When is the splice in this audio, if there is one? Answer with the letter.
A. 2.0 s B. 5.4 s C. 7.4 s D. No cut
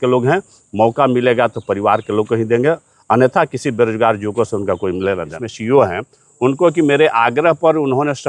B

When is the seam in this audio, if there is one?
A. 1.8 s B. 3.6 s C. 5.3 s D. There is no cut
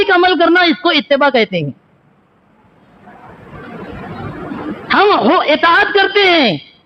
D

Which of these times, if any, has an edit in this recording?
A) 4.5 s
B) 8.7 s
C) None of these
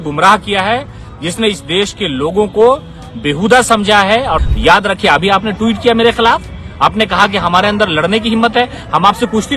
A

